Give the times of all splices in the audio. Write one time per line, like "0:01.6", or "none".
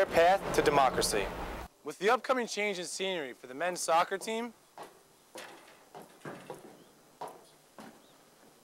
0:01.6